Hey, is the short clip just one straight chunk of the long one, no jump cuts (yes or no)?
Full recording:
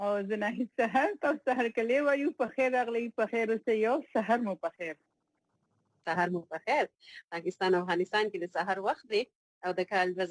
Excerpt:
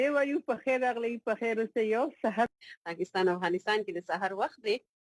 no